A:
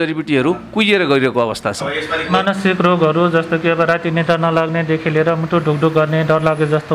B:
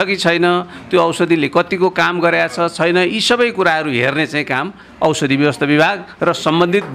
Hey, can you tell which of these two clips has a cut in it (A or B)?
A